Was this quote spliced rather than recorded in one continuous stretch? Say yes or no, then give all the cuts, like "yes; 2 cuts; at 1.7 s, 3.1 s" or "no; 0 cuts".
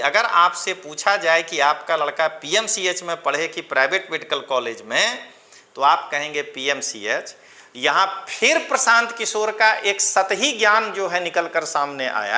no; 0 cuts